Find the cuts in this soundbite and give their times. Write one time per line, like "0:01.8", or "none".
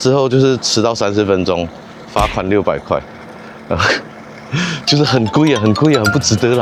none